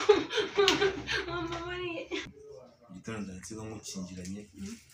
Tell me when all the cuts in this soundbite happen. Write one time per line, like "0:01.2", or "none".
0:02.4